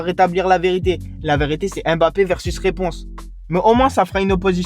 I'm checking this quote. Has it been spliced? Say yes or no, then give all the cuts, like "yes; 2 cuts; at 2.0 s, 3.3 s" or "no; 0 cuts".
yes; 1 cut; at 3.3 s